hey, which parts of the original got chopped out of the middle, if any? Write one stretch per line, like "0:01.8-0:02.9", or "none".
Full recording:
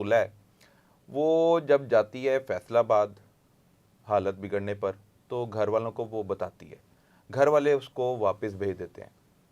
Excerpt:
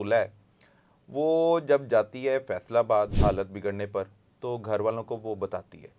0:03.1-0:04.0